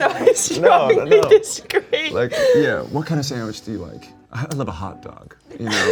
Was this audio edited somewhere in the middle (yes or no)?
no